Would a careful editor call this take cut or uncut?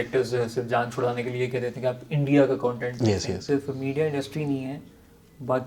cut